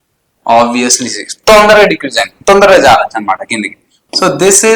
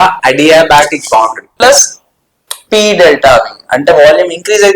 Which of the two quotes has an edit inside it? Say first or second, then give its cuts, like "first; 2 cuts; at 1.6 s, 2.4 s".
second; 1 cut; at 1.5 s